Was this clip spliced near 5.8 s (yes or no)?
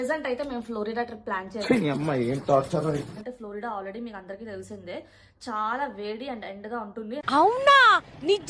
no